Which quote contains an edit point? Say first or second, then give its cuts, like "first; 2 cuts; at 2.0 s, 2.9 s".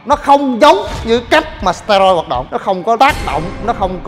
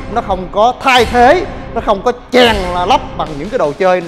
first; 1 cut; at 2.5 s